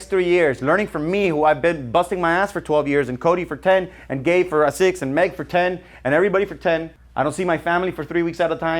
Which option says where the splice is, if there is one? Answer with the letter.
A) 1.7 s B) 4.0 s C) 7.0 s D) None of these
C